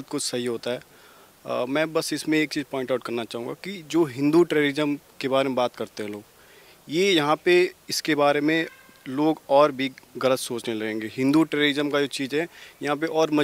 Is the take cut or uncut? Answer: uncut